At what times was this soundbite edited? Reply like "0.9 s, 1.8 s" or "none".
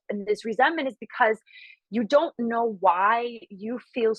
none